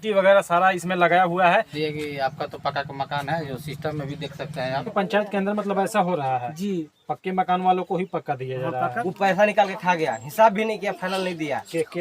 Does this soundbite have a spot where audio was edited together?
yes; 3 cuts; at 1.7 s, 4.9 s, 9.0 s

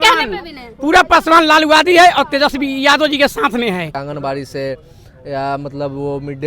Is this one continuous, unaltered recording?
no; 1 cut; at 4.0 s

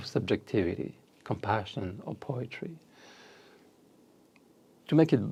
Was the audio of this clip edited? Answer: no; 0 cuts

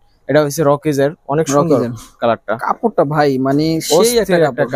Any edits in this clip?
no; 0 cuts

